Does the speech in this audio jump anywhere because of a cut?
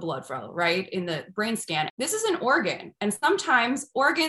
yes; 1 cut; at 1.9 s

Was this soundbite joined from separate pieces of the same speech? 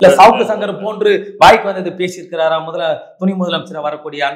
no; 0 cuts

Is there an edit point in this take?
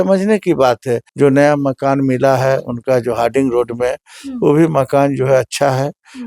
yes; 1 cut; at 1.1 s

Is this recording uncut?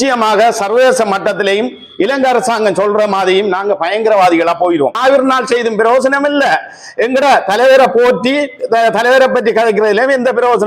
no; 1 cut; at 5.0 s

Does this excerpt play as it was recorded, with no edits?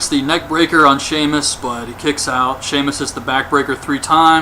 no; 1 cut; at 3.1 s

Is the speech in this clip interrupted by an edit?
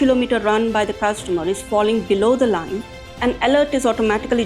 no; 0 cuts

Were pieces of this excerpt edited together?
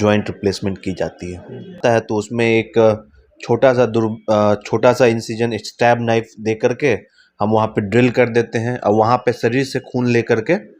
yes; 1 cut; at 1.8 s

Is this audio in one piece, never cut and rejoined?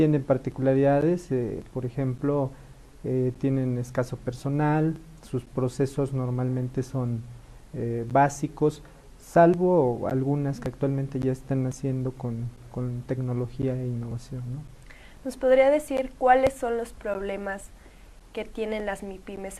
yes; 0 cuts

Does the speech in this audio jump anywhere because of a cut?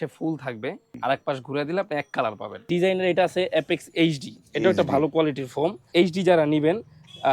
yes; 3 cuts; at 0.9 s, 2.6 s, 5.9 s

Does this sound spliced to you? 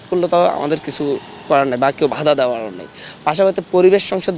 no; 0 cuts

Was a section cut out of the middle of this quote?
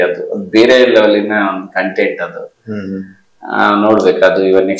no; 0 cuts

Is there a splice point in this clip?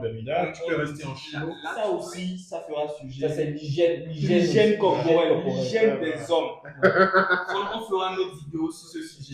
yes; 1 cut; at 1.7 s

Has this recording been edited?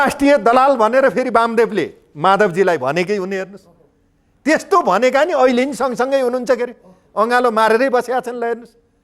no; 0 cuts

